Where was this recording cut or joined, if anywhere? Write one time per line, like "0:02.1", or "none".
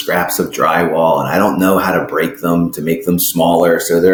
none